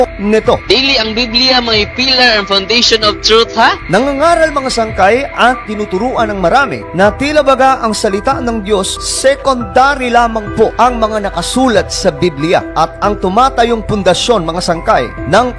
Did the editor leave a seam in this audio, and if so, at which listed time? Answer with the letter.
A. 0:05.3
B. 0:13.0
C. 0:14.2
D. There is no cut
B